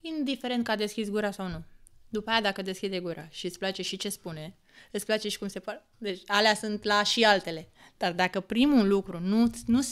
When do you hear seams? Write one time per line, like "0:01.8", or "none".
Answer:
none